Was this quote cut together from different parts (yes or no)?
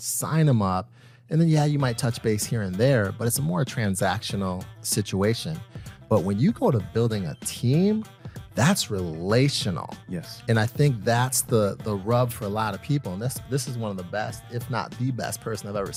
no